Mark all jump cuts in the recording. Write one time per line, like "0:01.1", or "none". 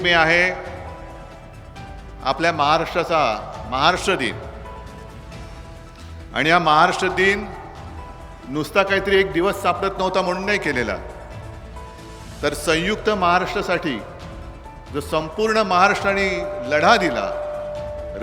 0:04.6
0:05.9